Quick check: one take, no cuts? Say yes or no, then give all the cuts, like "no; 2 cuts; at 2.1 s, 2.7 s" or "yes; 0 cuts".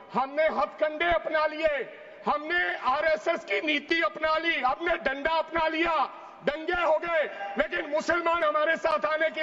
yes; 0 cuts